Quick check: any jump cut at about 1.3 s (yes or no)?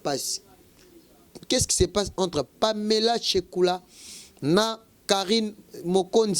yes